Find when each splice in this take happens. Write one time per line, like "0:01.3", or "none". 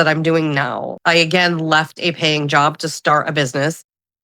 0:00.9